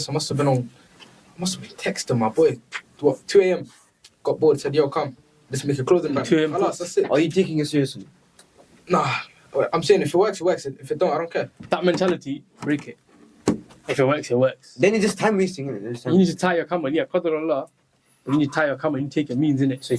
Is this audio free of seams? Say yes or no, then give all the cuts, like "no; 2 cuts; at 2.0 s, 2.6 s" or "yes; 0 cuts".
yes; 0 cuts